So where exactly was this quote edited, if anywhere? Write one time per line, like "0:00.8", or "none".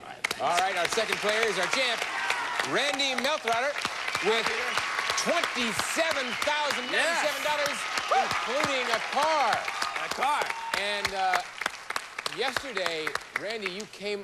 none